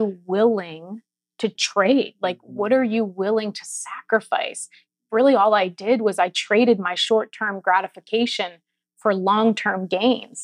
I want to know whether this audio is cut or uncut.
cut